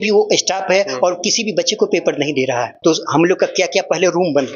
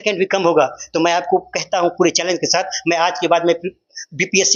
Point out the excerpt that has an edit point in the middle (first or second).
first